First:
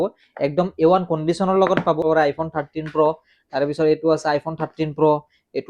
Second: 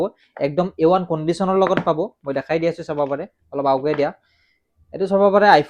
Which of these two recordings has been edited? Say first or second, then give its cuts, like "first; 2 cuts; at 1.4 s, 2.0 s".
first; 1 cut; at 2.0 s